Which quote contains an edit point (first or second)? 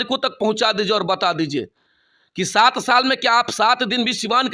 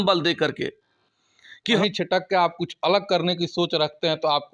second